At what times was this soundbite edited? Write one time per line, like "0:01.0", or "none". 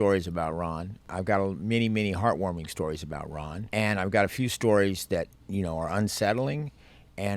0:01.0
0:03.5
0:05.4